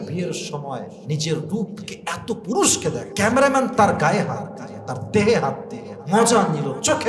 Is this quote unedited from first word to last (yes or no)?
no